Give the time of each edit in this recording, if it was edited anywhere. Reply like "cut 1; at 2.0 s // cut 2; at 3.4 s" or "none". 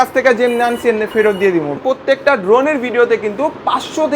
cut 1; at 1.8 s